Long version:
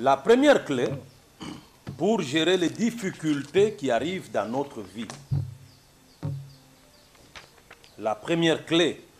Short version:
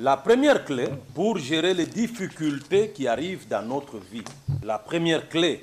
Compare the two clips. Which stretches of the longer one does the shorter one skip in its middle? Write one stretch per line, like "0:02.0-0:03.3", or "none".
0:01.0-0:01.9
0:05.4-0:08.0